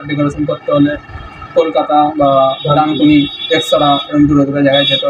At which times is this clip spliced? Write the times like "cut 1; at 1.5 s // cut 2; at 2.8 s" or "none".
none